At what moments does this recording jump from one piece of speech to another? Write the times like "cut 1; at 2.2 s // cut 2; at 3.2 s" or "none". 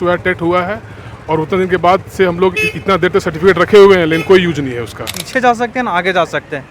cut 1; at 5.2 s